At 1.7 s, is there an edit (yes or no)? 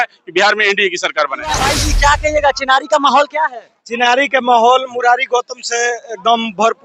yes